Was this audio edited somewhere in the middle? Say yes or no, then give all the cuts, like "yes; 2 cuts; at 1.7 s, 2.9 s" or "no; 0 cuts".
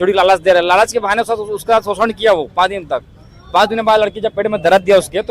no; 0 cuts